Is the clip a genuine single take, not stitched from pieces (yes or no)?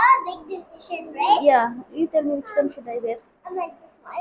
yes